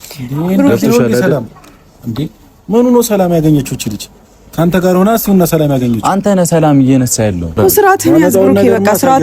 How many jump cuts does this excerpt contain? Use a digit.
1